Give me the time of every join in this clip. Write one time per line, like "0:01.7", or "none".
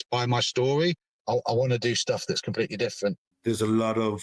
0:01.1
0:03.3